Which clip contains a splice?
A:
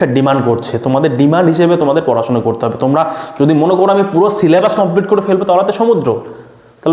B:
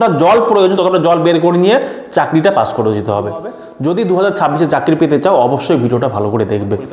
B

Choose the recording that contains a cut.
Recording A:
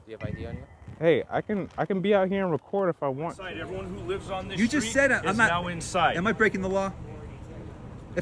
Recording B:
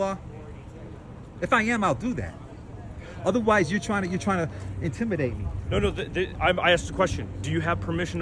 A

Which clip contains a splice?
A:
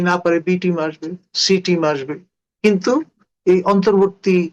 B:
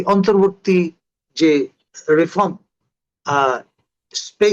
B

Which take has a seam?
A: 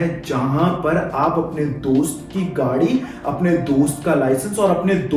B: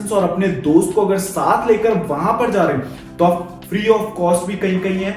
B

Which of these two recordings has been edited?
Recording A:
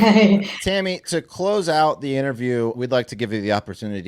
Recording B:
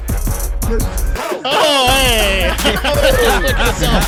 A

